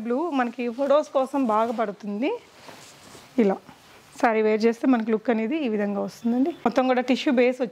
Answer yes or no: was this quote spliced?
yes